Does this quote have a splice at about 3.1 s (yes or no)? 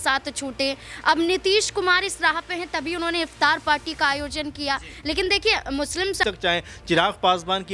no